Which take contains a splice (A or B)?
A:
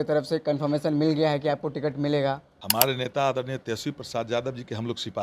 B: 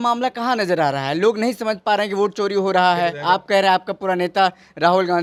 A